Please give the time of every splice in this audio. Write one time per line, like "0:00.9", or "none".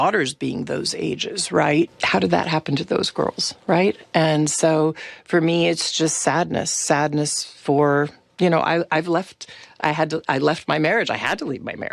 0:02.0